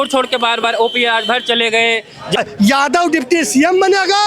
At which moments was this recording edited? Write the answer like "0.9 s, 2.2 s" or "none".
2.4 s